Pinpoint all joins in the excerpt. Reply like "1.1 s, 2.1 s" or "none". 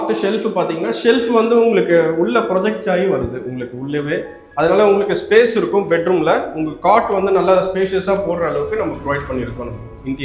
none